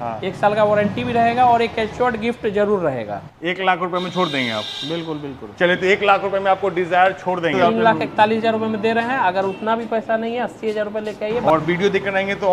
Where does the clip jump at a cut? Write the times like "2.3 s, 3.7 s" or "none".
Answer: 3.2 s, 7.5 s, 11.4 s